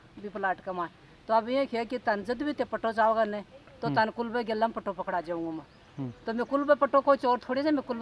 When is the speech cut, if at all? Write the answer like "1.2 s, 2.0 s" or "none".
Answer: none